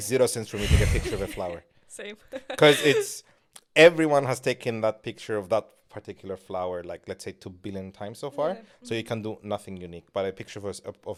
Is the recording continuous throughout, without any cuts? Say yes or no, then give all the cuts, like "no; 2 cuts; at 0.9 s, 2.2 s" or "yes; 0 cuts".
yes; 0 cuts